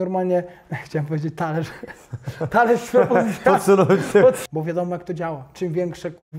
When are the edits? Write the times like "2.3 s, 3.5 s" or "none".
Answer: 4.4 s